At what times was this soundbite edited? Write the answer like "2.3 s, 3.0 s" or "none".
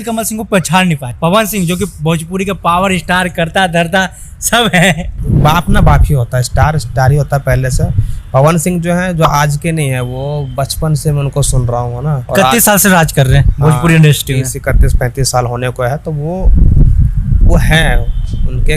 5.2 s

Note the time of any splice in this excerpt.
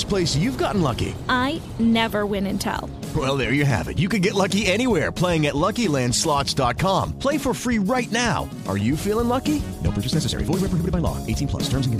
none

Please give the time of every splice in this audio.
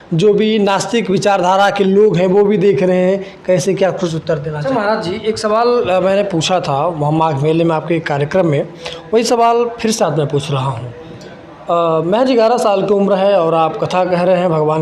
4.6 s

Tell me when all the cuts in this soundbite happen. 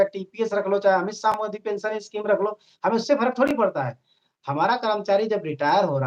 none

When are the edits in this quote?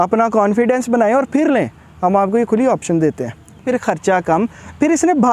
3.6 s

